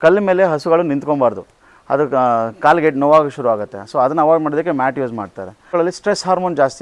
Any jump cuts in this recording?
yes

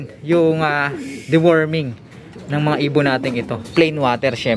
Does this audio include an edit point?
yes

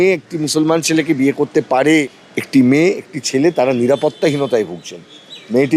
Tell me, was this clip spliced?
yes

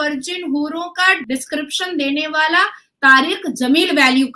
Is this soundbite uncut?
no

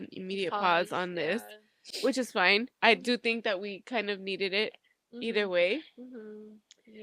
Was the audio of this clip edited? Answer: no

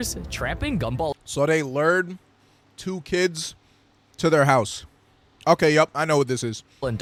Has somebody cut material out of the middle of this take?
no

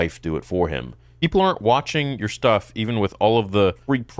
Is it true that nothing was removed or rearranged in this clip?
no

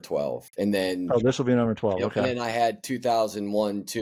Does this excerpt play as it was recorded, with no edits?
yes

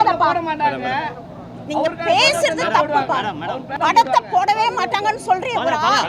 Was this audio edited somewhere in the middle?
yes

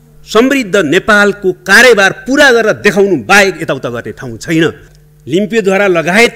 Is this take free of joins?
no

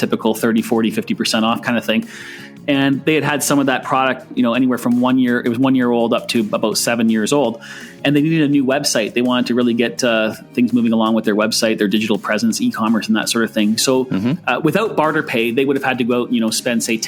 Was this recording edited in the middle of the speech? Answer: no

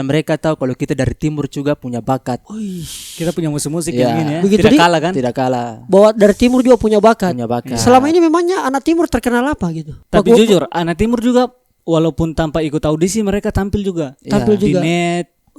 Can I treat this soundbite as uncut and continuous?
yes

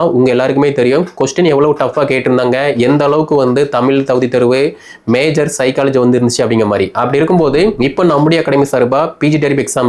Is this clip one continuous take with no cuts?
no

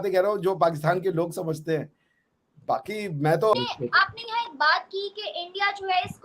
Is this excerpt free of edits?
no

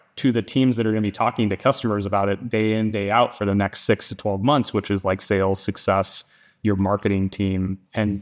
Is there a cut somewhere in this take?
no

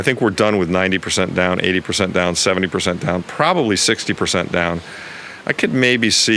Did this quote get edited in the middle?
no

